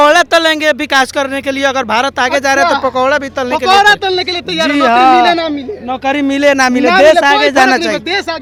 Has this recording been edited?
no; 0 cuts

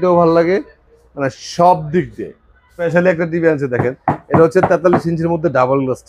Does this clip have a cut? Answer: yes; 1 cut; at 2.8 s

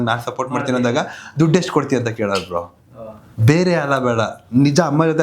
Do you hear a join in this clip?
no; 0 cuts

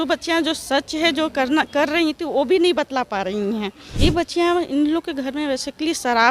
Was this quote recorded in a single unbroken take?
no; 1 cut; at 3.8 s

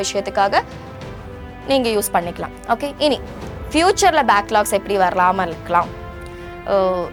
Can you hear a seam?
no; 0 cuts

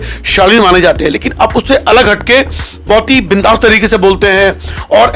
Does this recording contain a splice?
no; 0 cuts

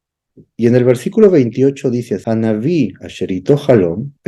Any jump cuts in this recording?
yes; 1 cut; at 2.2 s

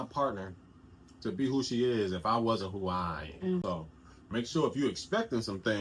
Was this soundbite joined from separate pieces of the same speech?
yes; 1 cut; at 3.6 s

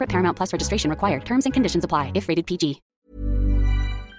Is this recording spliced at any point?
yes; 1 cut; at 3.1 s

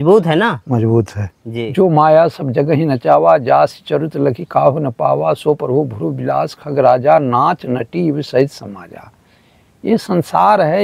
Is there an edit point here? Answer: yes; 1 cut; at 1.4 s

